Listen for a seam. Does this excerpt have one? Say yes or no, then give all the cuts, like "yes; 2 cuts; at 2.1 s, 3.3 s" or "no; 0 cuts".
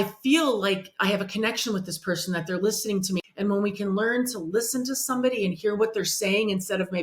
yes; 1 cut; at 3.2 s